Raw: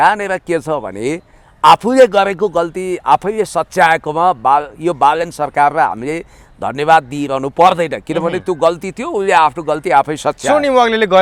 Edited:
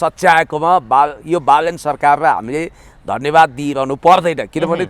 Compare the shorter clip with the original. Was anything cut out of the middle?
no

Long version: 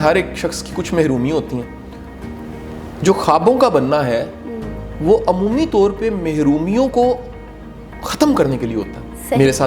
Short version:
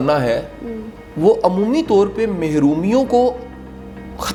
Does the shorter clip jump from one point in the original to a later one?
no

